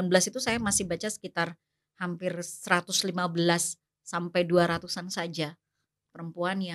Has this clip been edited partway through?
no; 0 cuts

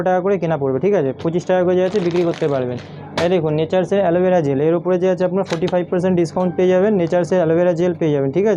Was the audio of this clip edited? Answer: no; 0 cuts

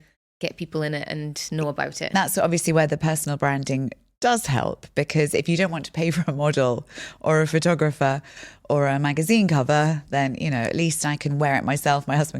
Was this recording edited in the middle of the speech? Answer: yes; 1 cut; at 2.1 s

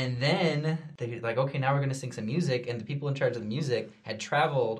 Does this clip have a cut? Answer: yes; 1 cut; at 0.9 s

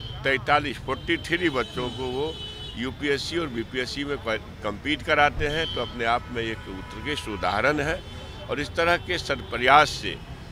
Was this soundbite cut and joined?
no; 0 cuts

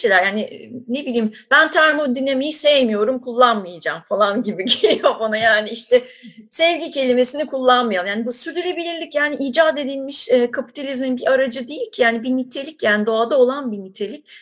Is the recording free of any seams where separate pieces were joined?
yes; 0 cuts

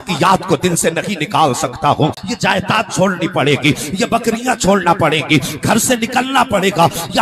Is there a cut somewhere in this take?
yes; 1 cut; at 2.2 s

